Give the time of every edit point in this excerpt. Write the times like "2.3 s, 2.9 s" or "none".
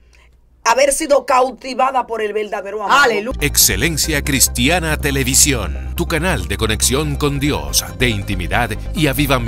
3.3 s